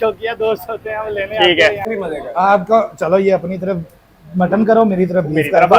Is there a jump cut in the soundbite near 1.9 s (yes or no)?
yes